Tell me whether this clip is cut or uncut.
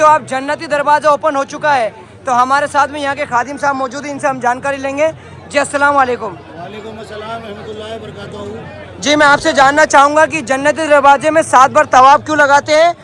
uncut